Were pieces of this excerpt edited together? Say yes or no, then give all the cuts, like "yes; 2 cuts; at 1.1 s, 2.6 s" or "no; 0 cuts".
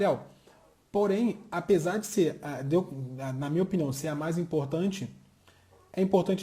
no; 0 cuts